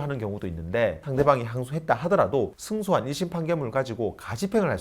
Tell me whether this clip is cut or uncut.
cut